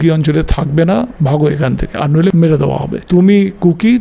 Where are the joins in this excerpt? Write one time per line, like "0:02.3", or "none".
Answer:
0:01.1
0:02.4